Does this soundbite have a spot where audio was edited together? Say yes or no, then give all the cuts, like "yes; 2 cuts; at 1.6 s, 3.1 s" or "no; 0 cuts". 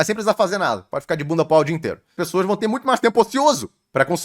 yes; 1 cut; at 2.2 s